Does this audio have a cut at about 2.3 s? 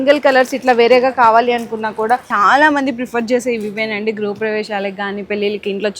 yes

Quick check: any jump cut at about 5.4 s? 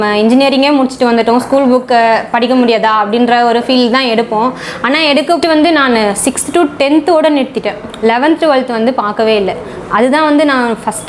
yes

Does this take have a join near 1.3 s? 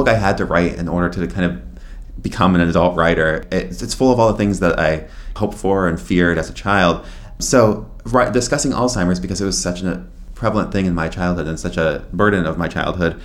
no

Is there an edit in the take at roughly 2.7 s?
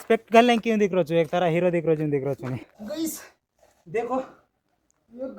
yes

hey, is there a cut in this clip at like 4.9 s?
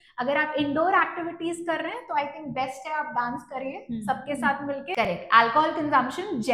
yes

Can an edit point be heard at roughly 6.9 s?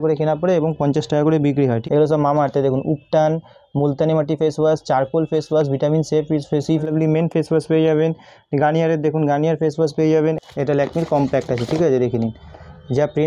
yes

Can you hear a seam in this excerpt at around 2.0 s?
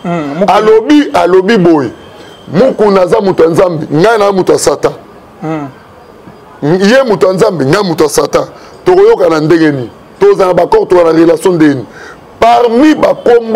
no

